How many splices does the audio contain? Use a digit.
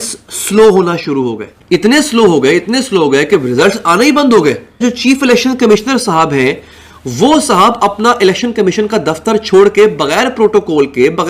1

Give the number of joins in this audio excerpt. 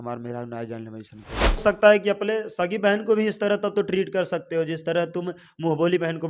1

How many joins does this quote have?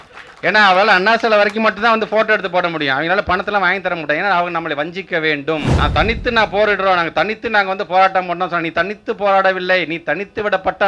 1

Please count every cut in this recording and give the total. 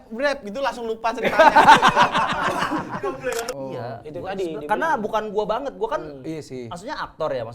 1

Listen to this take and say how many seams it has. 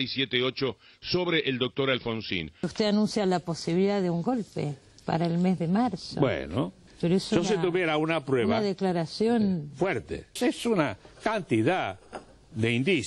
1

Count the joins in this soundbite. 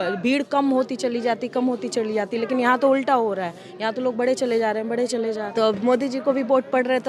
1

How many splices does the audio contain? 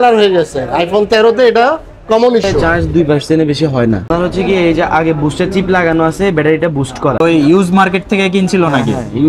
2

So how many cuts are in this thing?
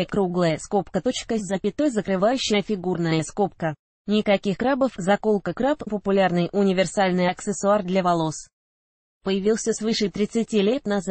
1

